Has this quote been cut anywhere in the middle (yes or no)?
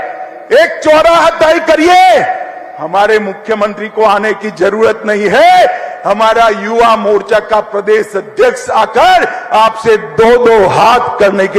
no